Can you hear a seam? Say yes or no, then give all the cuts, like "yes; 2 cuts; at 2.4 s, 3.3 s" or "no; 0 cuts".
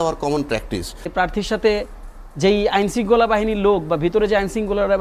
yes; 1 cut; at 1.0 s